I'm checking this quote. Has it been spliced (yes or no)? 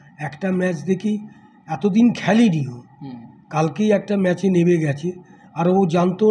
no